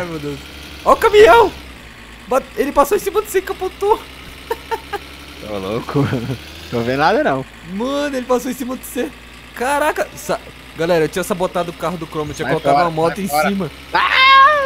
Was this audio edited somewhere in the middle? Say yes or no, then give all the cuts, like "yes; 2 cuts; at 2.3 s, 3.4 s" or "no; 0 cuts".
no; 0 cuts